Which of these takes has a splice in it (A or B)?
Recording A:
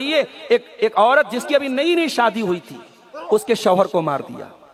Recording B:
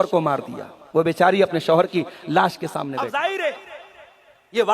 B